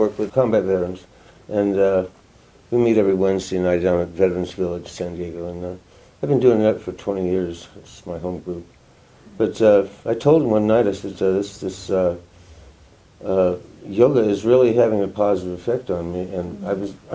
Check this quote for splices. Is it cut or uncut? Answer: uncut